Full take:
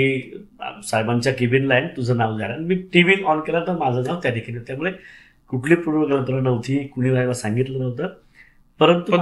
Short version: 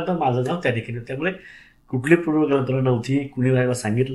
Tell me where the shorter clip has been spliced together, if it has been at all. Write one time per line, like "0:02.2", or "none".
none